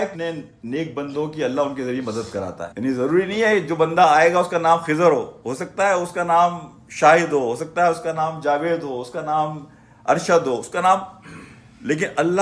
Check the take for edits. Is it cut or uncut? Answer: uncut